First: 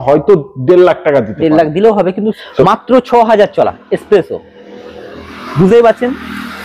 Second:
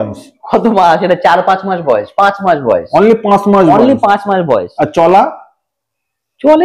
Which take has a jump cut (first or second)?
first